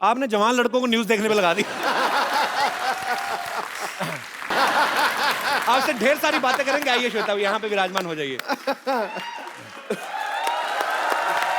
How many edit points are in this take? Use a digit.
1